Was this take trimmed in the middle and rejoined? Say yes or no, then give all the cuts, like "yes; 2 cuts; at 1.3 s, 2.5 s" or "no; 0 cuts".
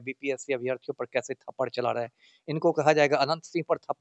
no; 0 cuts